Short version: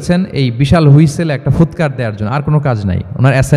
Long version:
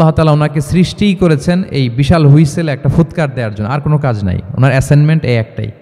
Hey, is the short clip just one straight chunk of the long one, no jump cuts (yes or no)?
yes